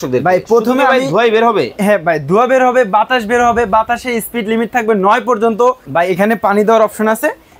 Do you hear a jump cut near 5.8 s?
yes; 1 cut; at 5.8 s

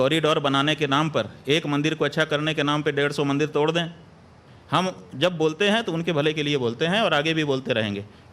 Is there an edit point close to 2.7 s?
yes; 1 cut; at 2.7 s

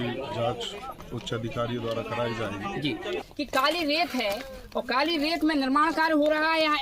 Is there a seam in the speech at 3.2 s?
yes; 1 cut; at 3.2 s

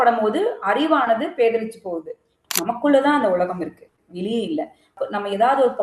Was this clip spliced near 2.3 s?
yes; 1 cut; at 2.3 s

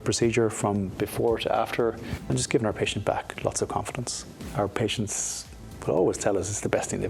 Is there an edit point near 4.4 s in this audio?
yes; 2 cuts; at 2.1 s, 4.4 s

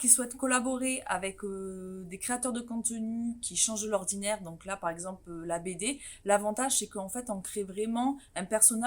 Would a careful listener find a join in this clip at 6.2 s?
no; 0 cuts

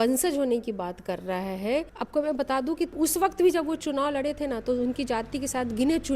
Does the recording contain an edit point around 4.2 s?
no; 2 cuts; at 1.9 s, 2.9 s

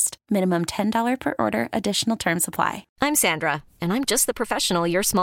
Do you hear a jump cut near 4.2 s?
no; 1 cut; at 2.9 s

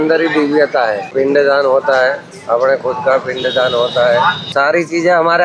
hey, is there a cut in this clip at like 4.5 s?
yes; 2 cuts; at 1.1 s, 4.5 s

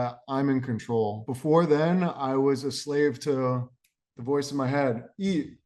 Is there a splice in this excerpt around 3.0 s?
no; 1 cut; at 1.3 s

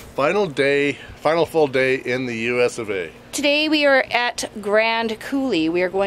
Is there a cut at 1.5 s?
no; 1 cut; at 3.4 s

